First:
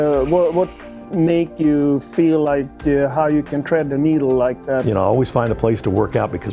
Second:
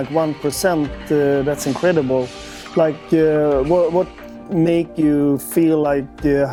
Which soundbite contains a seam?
first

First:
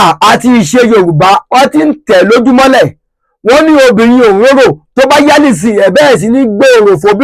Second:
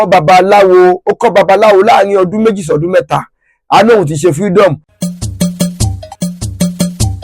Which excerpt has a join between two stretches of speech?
second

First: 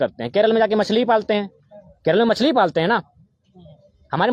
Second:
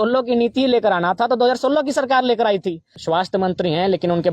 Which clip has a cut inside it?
second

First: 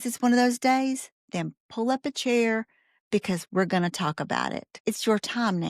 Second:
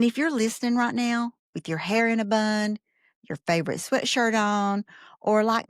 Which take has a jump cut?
first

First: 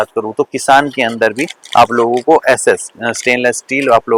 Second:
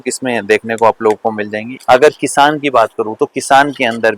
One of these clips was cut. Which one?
second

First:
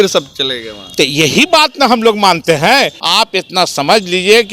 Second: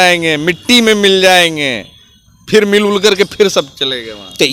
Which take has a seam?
first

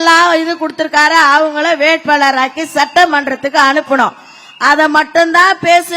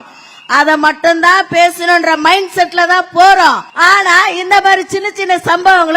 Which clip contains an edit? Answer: second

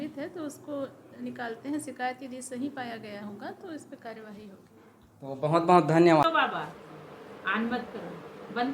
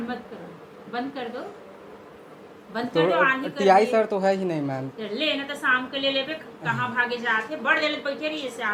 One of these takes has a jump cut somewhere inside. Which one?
first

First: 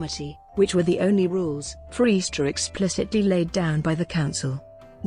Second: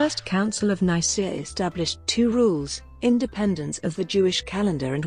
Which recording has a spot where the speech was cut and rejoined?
second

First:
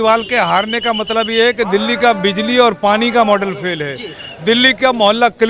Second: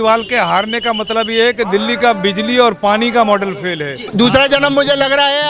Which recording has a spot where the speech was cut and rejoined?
second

